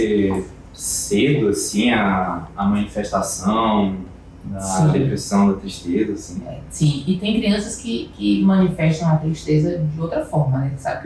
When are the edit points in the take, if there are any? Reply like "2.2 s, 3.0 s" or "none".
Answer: none